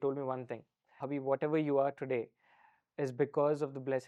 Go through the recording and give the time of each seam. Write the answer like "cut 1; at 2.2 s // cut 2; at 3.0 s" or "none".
none